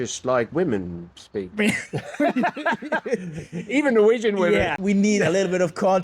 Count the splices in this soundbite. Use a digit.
1